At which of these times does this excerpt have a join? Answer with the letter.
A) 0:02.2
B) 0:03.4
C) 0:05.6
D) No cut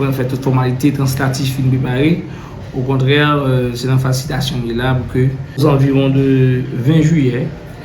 C